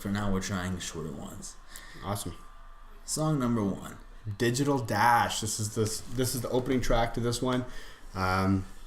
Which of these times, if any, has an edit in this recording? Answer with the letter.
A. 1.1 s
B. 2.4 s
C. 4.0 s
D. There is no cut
B